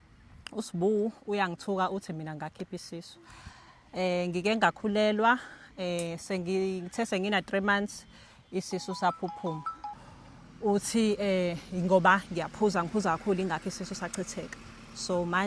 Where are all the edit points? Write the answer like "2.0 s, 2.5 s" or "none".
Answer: 10.0 s